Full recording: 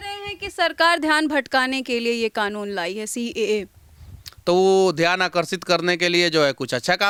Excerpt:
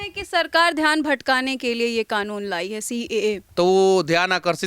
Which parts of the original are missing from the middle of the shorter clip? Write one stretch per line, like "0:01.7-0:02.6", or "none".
0:03.7-0:04.3